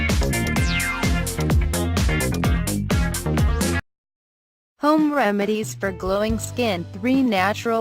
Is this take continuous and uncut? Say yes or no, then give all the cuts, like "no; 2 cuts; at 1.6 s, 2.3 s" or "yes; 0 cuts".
no; 1 cut; at 3.8 s